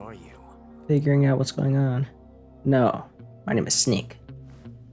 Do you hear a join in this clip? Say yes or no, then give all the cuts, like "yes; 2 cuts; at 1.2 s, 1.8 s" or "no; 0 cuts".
no; 0 cuts